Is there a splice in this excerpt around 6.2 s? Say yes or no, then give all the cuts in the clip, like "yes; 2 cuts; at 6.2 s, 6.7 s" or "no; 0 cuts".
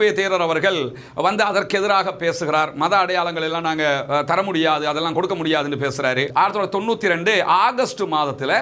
yes; 1 cut; at 6.2 s